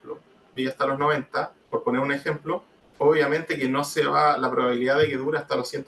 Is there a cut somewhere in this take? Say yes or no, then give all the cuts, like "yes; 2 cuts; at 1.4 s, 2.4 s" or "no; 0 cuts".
yes; 2 cuts; at 1.6 s, 2.8 s